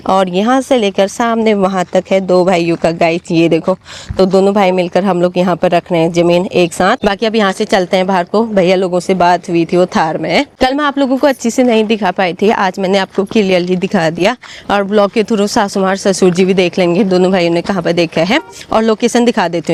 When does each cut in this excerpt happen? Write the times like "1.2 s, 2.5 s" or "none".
none